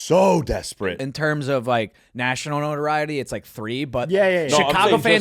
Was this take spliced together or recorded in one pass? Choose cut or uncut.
cut